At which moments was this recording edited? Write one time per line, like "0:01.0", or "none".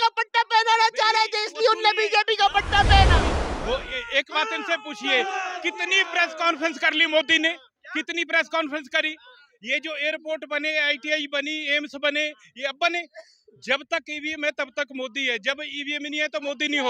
0:03.3